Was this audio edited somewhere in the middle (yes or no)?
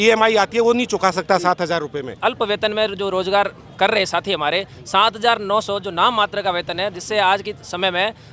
yes